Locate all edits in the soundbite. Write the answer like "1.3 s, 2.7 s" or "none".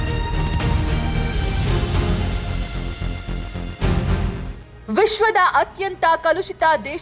4.7 s